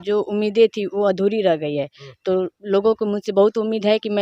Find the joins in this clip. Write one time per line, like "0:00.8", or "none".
none